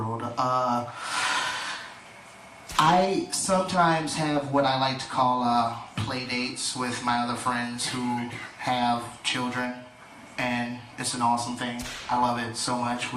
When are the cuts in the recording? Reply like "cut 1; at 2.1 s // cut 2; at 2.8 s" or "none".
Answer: none